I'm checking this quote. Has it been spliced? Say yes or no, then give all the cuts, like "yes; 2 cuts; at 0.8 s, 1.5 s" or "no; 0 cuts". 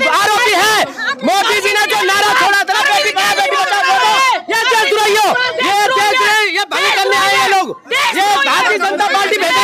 no; 0 cuts